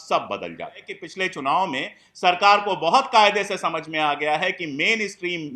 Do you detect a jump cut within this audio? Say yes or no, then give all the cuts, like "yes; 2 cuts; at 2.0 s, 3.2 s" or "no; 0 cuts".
yes; 1 cut; at 1.0 s